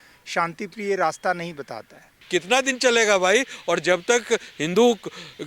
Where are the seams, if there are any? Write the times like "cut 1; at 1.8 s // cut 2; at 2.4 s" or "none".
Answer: cut 1; at 2.2 s